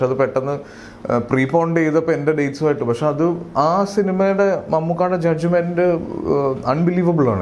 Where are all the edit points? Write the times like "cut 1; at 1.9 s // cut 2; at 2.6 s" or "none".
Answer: none